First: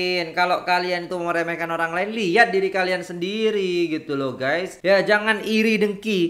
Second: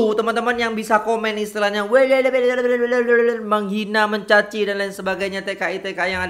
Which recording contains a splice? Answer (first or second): first